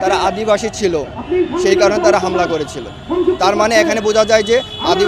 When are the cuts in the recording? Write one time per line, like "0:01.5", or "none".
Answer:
none